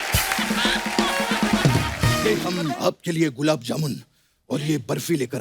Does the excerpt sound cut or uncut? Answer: cut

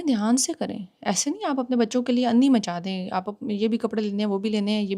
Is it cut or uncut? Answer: uncut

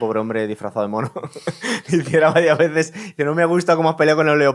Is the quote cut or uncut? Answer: uncut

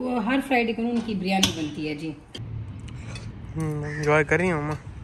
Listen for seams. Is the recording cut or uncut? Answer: cut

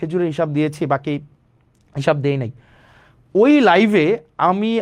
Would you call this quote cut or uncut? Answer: uncut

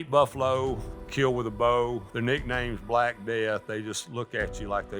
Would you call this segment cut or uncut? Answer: cut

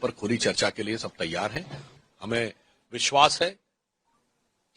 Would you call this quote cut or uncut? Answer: cut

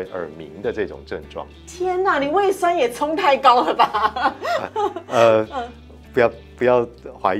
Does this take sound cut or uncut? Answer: uncut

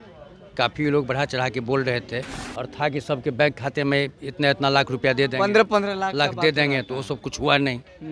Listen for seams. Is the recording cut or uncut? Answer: cut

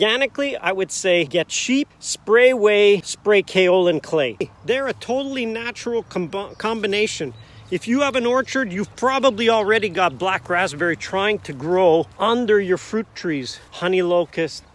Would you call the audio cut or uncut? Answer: cut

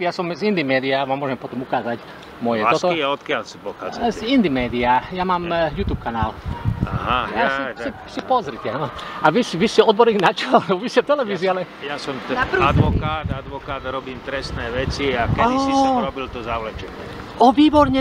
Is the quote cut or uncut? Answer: uncut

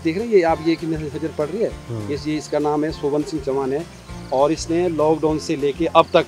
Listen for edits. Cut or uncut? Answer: uncut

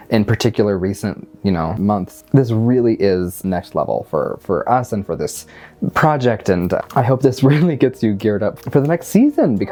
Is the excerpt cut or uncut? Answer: uncut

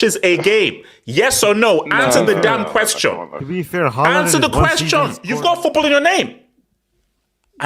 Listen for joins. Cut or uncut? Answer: cut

